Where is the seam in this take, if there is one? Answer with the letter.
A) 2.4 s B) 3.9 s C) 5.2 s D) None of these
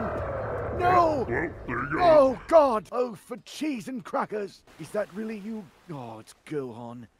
D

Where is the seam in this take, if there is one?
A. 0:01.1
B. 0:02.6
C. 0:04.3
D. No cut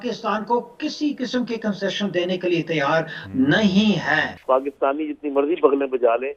C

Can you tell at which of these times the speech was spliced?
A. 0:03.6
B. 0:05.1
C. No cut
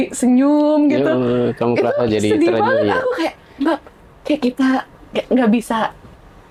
C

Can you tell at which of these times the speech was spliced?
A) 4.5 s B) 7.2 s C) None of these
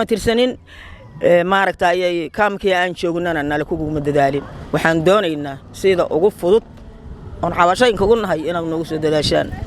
C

